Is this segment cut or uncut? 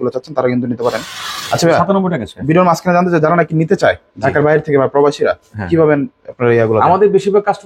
uncut